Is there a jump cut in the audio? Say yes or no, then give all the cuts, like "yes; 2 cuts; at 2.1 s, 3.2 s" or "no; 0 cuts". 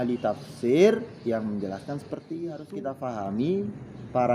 yes; 1 cut; at 2.6 s